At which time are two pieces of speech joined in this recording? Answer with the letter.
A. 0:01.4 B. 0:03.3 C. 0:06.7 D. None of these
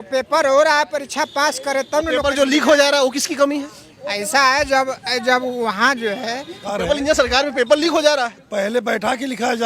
C